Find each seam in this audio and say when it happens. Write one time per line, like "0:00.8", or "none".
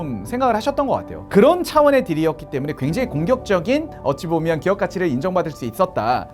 0:01.2